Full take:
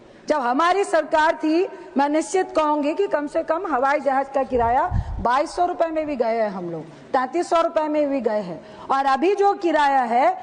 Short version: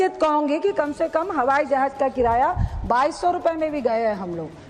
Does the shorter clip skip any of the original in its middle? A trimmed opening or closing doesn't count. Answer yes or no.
no